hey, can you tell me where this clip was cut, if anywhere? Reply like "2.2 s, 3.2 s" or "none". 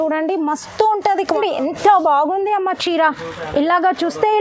1.4 s